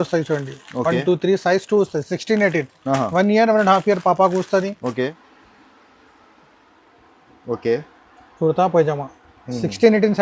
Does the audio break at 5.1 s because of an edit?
yes; 1 cut; at 5.1 s

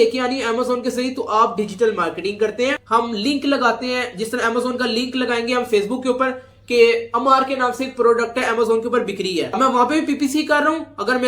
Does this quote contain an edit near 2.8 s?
yes; 1 cut; at 2.8 s

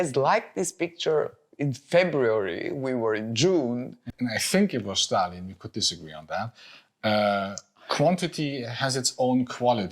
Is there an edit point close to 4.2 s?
yes; 1 cut; at 4.2 s

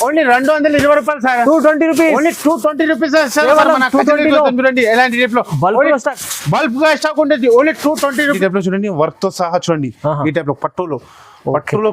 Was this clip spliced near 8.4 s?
yes; 1 cut; at 8.4 s

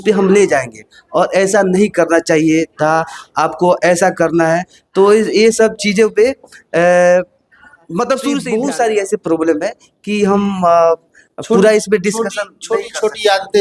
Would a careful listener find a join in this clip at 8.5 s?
yes; 1 cut; at 8.5 s

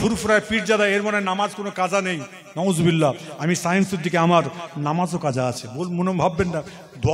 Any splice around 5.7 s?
no; 0 cuts

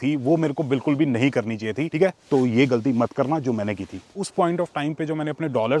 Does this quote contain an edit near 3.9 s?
yes; 2 cuts; at 1.9 s, 3.9 s

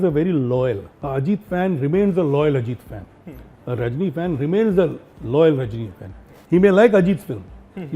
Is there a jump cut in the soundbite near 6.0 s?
no; 1 cut; at 0.9 s

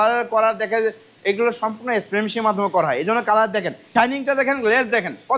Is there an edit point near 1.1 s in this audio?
no; 1 cut; at 3.8 s

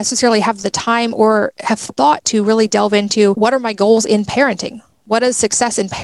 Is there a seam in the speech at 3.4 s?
yes; 1 cut; at 3.4 s

